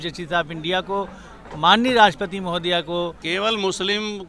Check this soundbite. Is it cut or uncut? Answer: cut